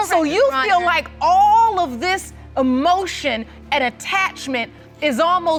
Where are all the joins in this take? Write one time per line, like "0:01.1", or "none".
none